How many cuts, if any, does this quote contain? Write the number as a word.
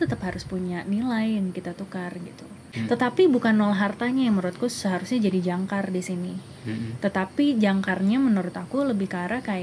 one